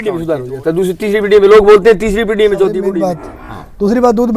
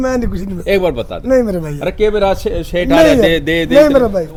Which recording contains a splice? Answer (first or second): first